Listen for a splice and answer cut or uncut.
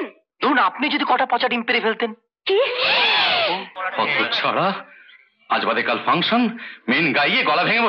cut